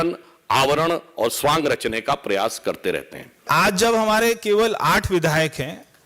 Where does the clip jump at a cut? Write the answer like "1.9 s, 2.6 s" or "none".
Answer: 3.5 s

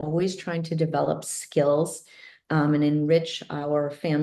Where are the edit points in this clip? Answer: none

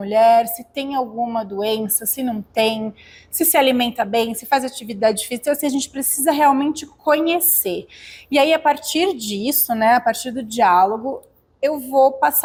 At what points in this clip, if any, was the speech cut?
none

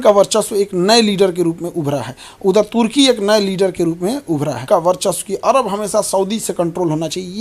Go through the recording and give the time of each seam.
4.6 s

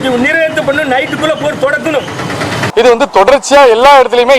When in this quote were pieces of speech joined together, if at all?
2.5 s

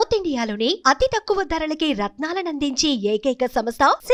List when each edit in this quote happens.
none

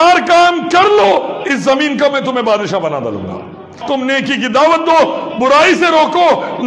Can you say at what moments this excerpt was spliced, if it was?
3.7 s

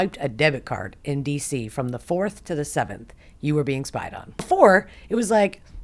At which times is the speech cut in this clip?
4.5 s

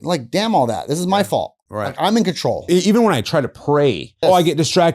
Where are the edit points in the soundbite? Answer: 2.6 s, 4.1 s

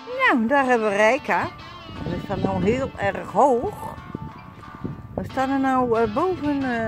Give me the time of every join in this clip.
none

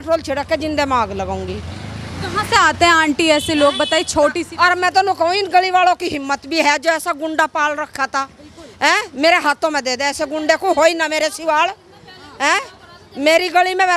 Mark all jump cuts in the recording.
none

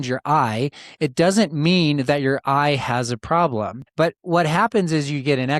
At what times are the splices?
3.8 s

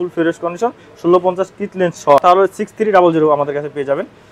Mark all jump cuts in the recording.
2.2 s

